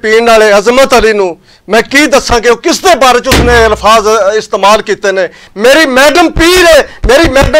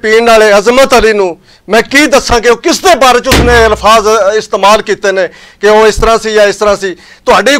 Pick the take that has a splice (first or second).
first